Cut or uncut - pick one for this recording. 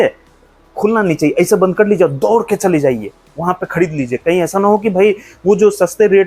uncut